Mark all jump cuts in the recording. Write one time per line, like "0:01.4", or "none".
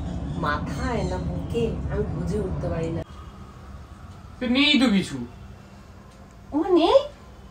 0:03.1